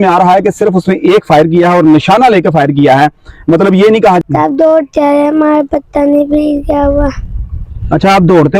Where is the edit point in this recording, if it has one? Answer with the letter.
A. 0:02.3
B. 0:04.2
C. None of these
B